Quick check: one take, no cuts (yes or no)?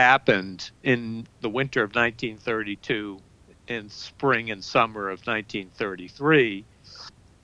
no